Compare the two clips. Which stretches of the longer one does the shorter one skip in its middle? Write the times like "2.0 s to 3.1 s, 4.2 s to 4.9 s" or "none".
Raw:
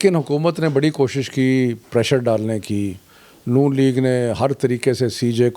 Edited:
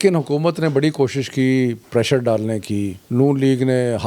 3.0 s to 3.3 s